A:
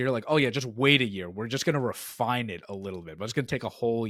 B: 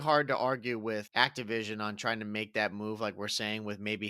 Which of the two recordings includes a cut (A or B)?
B